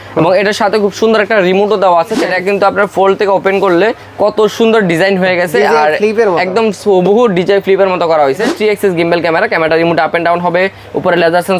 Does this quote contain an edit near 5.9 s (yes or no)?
no